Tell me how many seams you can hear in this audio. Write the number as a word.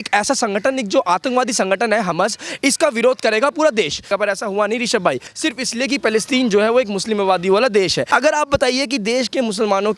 three